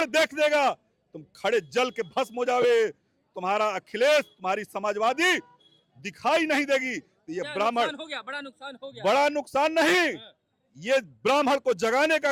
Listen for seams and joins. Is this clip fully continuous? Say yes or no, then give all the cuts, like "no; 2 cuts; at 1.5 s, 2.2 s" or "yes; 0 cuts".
yes; 0 cuts